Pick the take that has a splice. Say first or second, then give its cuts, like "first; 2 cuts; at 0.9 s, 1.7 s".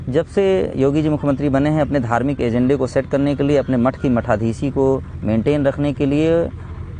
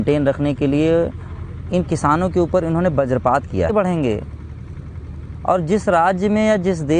second; 1 cut; at 3.7 s